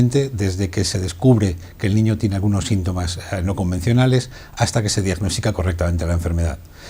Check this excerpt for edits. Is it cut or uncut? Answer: cut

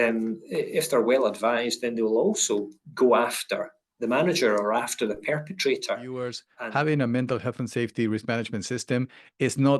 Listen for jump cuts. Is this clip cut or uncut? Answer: cut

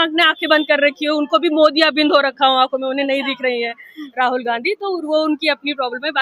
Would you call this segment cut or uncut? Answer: uncut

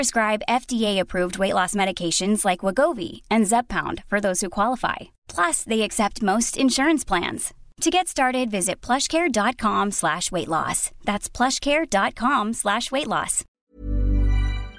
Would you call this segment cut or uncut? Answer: cut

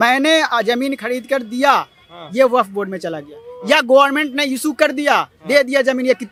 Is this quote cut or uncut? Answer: uncut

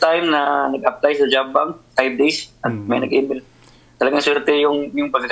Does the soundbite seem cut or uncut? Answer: uncut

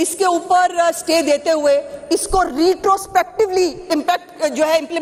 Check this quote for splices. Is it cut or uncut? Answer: uncut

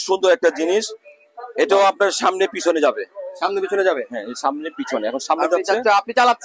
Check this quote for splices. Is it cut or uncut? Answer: uncut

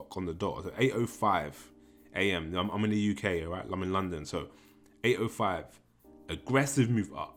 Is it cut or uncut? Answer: uncut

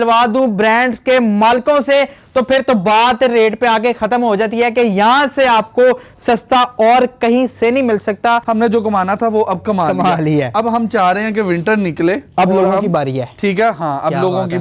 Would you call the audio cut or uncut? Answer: cut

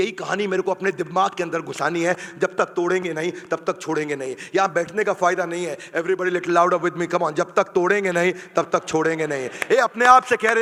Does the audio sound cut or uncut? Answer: uncut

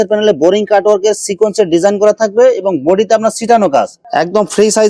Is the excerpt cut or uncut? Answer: cut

